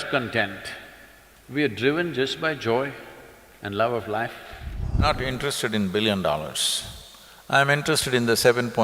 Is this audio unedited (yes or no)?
no